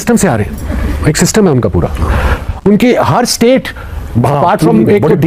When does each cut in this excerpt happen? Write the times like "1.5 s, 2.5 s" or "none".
none